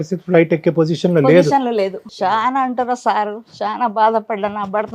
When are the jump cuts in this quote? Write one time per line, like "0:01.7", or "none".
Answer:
0:02.0